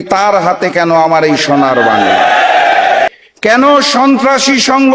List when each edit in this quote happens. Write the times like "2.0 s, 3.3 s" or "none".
3.1 s